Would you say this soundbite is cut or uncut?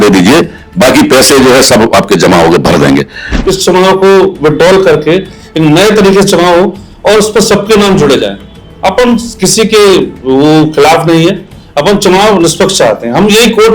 cut